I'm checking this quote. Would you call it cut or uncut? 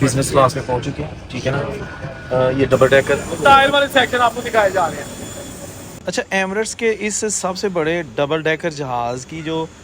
cut